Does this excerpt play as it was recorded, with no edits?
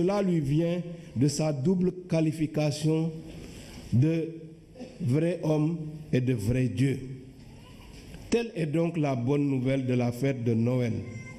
no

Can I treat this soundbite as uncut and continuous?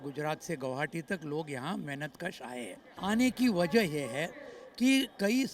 no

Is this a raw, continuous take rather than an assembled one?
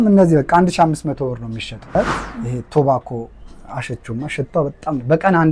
no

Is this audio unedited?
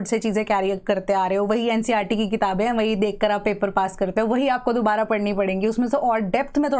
yes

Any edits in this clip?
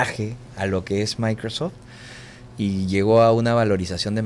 no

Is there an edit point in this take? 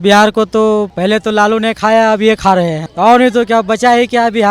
yes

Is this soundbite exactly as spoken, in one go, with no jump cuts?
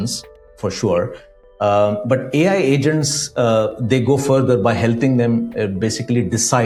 yes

